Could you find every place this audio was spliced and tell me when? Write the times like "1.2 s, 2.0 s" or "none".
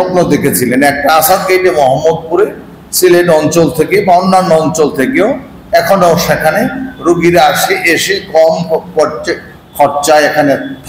none